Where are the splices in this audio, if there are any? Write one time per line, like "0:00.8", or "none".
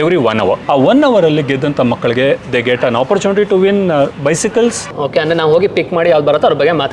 0:04.8